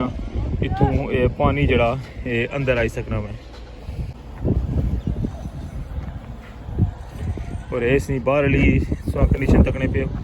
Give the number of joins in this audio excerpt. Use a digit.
1